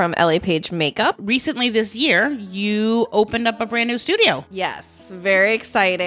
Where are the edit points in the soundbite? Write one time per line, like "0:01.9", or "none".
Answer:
0:01.2
0:04.5